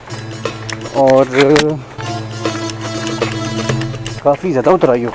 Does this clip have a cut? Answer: no; 0 cuts

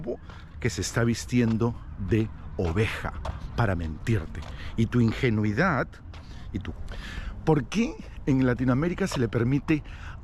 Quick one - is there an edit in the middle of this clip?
yes; 1 cut; at 6.7 s

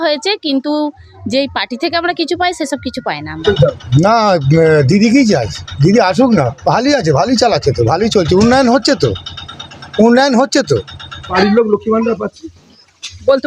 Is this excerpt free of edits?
no; 2 cuts; at 3.4 s, 11.3 s

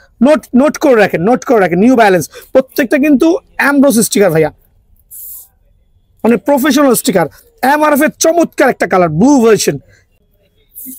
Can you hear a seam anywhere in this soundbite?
yes; 1 cut; at 10.1 s

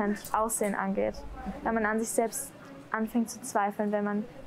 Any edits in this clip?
yes; 1 cut; at 2.9 s

